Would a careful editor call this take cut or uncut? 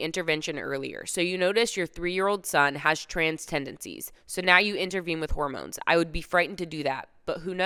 uncut